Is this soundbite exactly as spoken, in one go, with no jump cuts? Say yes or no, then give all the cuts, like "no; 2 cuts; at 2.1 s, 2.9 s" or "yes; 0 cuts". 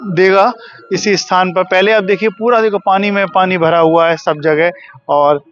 yes; 0 cuts